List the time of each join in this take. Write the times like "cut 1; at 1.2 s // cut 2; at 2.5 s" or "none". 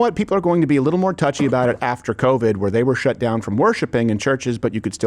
none